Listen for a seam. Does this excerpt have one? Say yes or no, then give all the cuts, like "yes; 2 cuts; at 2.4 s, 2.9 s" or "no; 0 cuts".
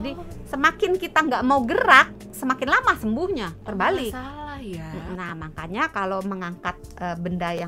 yes; 1 cut; at 5.2 s